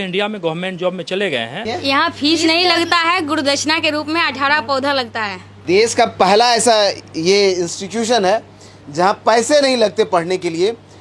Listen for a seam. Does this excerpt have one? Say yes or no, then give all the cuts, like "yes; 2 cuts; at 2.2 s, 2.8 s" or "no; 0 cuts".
yes; 2 cuts; at 1.6 s, 5.5 s